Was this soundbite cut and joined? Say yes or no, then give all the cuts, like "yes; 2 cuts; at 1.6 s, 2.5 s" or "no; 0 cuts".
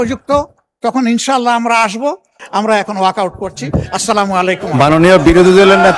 yes; 1 cut; at 2.4 s